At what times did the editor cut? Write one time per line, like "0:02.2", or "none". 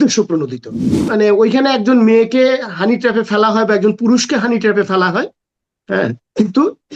0:01.0